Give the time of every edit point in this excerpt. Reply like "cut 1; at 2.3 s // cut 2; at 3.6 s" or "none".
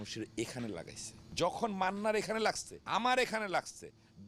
cut 1; at 1.2 s // cut 2; at 2.7 s